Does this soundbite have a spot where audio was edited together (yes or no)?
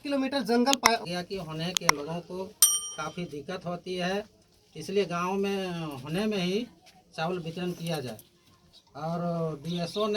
yes